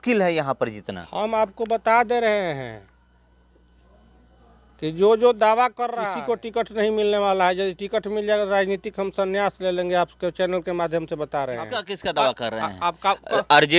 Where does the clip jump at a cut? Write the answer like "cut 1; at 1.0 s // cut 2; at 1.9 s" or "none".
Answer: cut 1; at 5.9 s // cut 2; at 11.8 s